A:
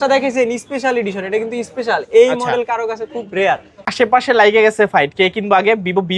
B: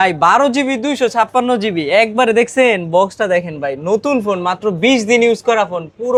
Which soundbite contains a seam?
A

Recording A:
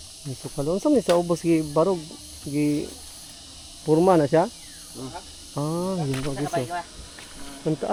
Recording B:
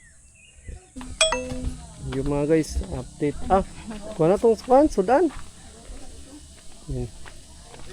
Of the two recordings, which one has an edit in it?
B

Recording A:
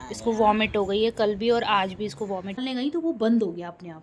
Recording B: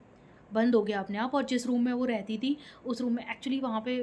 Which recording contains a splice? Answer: A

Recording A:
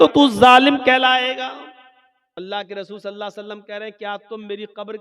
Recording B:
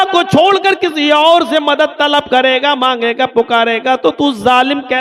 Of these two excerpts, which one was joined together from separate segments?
A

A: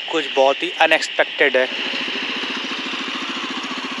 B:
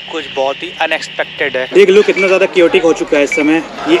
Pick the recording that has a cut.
B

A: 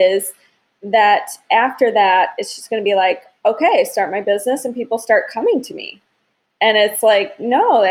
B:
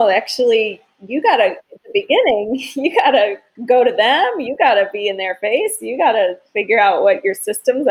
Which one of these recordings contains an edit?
B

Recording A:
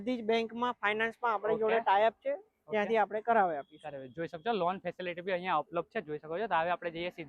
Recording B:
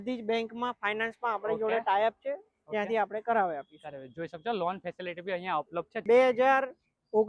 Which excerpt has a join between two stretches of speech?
B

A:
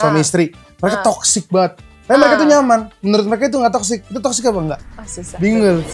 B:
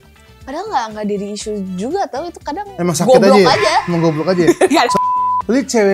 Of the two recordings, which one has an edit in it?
B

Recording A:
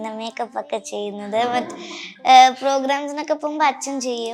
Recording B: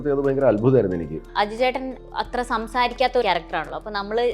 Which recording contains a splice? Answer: B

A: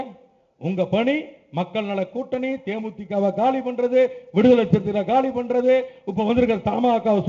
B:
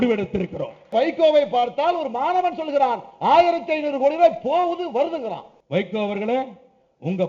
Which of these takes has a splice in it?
B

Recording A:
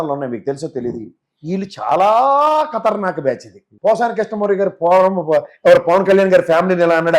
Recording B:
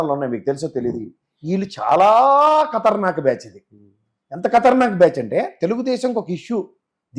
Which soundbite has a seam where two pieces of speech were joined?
A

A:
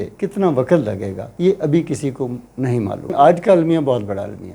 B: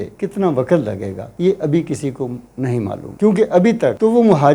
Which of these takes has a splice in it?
A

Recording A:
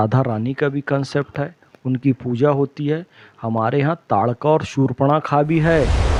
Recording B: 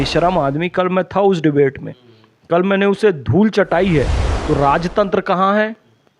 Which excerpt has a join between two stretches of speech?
B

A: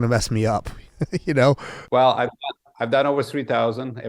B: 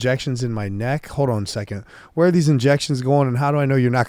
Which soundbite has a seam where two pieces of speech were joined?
A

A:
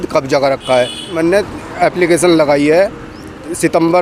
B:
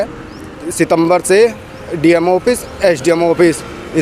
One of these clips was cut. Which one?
A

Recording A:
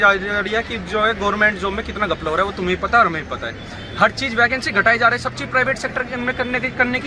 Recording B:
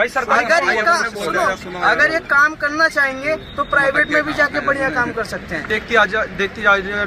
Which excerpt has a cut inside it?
B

